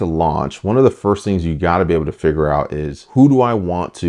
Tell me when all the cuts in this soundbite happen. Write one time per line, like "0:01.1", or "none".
none